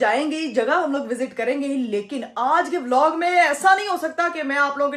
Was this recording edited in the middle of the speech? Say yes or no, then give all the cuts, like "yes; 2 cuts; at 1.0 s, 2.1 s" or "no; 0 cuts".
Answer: no; 0 cuts